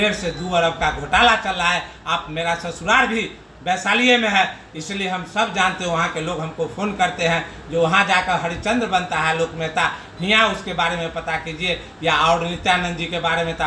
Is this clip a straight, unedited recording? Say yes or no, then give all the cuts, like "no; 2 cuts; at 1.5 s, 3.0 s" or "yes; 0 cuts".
yes; 0 cuts